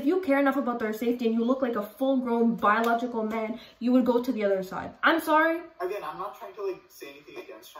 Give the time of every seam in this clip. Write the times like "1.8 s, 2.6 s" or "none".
5.7 s